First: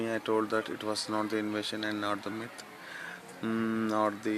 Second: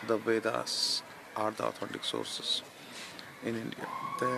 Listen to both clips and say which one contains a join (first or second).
first